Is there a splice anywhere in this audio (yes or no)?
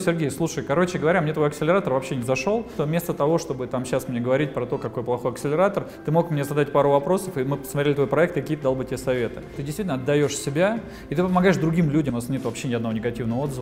yes